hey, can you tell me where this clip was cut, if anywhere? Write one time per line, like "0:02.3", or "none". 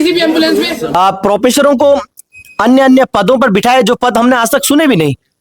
0:01.0